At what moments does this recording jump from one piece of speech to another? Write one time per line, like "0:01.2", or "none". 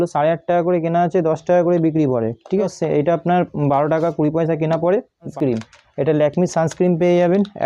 0:02.6
0:05.3